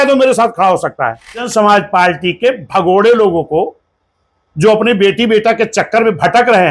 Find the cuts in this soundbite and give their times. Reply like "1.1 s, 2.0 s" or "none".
1.5 s